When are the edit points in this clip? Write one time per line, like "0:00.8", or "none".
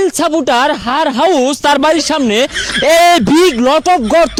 none